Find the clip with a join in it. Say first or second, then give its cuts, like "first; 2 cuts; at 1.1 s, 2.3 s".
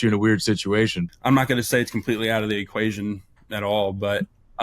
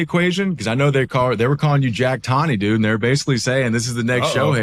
first; 1 cut; at 1.0 s